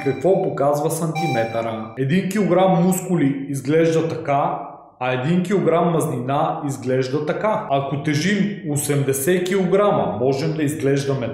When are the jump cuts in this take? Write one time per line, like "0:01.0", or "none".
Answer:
0:01.9
0:07.6